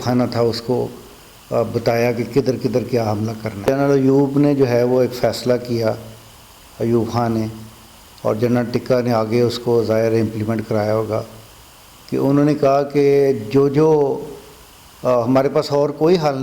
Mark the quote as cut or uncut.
cut